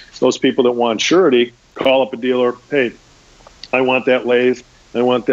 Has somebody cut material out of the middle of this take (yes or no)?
yes